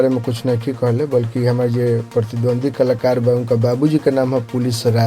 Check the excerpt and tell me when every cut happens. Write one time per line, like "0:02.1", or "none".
0:01.3